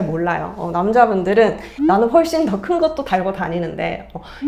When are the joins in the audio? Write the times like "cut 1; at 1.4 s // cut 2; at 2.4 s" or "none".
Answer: none